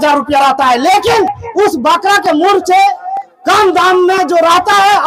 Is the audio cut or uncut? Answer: uncut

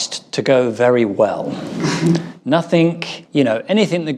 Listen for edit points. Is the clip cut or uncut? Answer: uncut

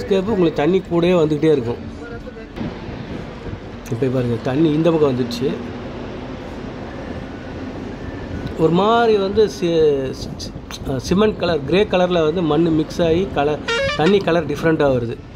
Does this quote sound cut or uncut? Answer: cut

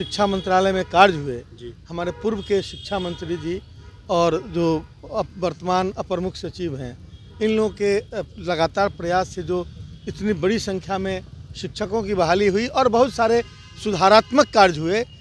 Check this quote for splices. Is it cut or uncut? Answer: uncut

